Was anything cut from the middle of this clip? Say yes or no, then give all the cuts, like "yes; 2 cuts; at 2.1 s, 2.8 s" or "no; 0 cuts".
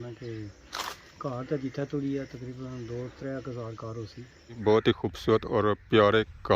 yes; 1 cut; at 4.5 s